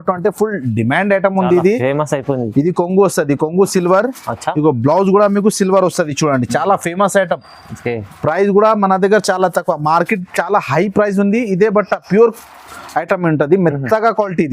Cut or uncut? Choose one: uncut